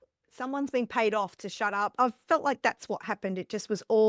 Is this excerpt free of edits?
no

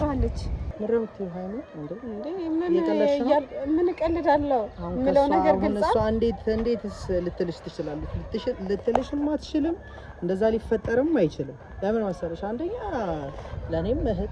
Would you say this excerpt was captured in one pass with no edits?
yes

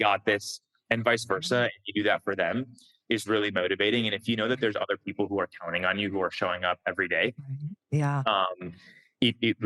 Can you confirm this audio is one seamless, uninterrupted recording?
yes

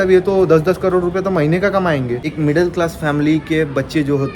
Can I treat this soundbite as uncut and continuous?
no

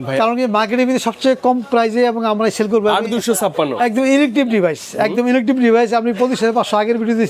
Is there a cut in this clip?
no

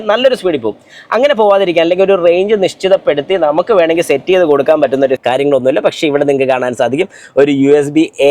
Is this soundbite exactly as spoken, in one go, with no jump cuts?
no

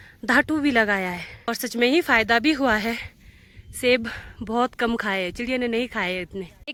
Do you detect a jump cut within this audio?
no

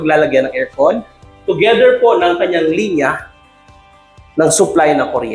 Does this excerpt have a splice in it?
no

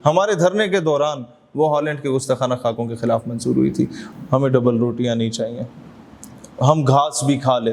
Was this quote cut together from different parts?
yes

